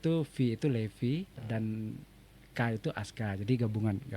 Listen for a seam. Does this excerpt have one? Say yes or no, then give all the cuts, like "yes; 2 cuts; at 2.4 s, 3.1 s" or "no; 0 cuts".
yes; 1 cut; at 1.4 s